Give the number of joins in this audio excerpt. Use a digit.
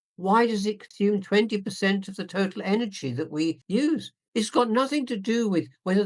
2